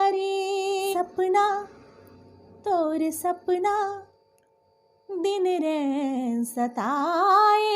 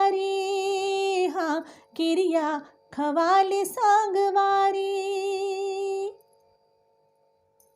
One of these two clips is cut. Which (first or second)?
first